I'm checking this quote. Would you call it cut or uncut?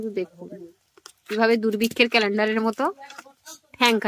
uncut